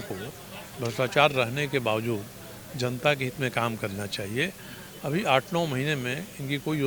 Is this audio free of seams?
yes; 0 cuts

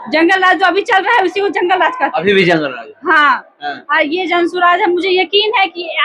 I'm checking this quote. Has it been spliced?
no; 0 cuts

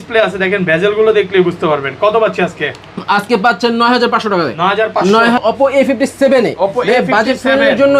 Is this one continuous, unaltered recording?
no; 1 cut; at 5.4 s

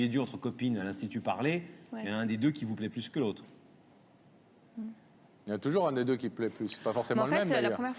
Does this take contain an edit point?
no; 0 cuts

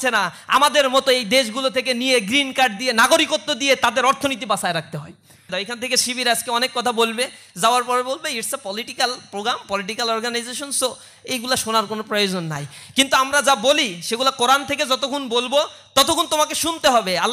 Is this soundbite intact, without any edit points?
no; 1 cut; at 5.5 s

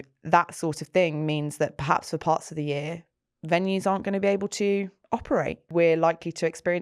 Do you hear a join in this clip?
yes; 1 cut; at 5.7 s

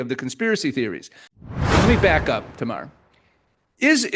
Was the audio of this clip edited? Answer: yes; 1 cut; at 1.5 s

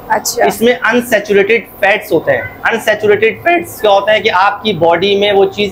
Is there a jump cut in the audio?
no; 0 cuts

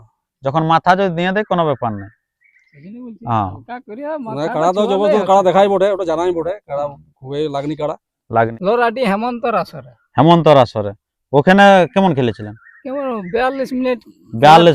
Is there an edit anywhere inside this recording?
yes; 1 cut; at 8.5 s

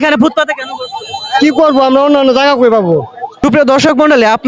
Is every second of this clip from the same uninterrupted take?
yes; 0 cuts

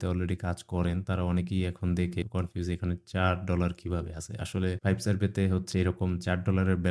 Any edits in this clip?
no; 0 cuts

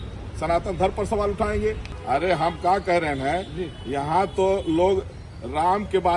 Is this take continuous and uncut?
no; 1 cut; at 1.9 s

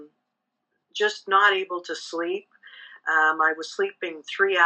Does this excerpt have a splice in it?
no; 0 cuts

